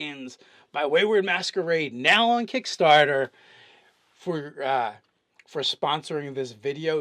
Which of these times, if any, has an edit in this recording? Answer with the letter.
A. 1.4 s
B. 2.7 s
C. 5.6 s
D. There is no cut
A